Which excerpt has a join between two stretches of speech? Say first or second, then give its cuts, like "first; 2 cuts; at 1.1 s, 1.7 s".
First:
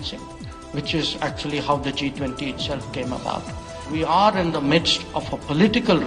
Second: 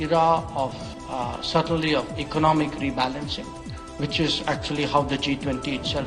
first; 1 cut; at 3.8 s